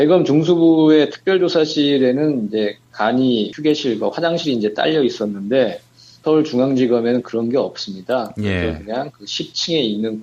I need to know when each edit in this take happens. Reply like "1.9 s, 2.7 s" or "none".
2.9 s